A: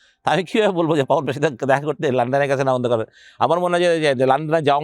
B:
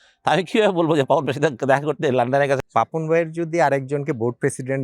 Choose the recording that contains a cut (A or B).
B